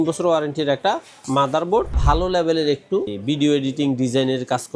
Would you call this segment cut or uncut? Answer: cut